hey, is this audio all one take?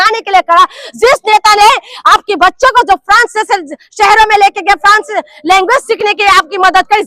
yes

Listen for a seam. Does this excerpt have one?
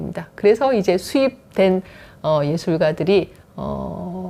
no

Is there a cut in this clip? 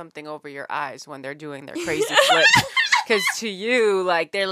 no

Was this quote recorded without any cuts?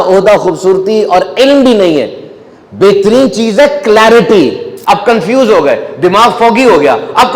no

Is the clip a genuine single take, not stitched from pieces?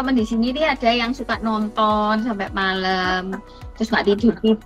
yes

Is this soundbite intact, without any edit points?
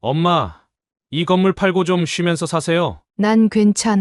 no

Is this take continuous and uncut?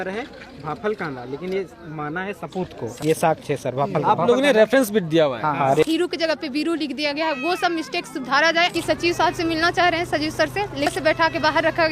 no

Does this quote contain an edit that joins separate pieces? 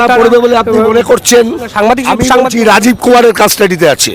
no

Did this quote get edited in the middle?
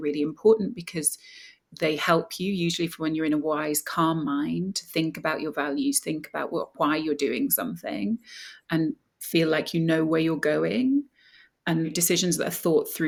no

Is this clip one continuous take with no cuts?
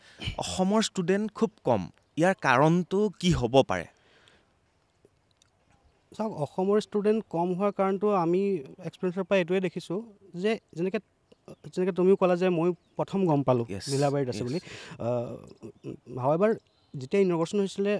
yes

